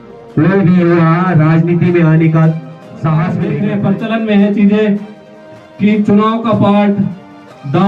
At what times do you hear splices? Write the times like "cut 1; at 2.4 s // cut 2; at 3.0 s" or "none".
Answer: cut 1; at 3.5 s